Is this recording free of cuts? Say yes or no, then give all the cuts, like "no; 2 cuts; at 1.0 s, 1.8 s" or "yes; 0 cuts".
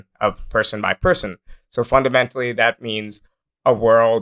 yes; 0 cuts